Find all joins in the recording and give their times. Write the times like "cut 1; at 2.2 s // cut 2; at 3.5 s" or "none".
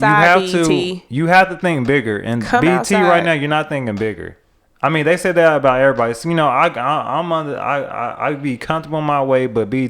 cut 1; at 1.0 s